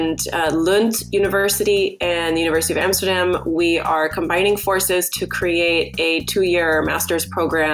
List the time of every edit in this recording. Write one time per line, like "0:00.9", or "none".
none